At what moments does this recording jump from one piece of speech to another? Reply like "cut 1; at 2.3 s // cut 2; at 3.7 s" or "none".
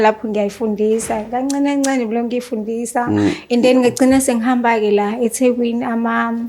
none